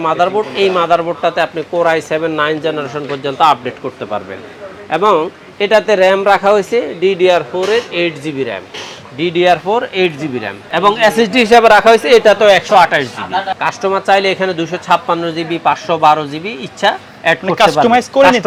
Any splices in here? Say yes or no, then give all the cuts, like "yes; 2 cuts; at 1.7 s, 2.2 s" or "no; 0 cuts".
no; 0 cuts